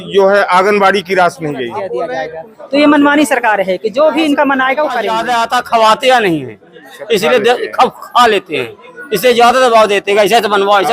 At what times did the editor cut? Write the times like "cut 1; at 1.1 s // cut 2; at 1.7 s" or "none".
cut 1; at 2.1 s // cut 2; at 5.1 s